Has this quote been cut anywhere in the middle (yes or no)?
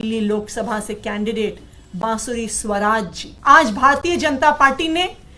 yes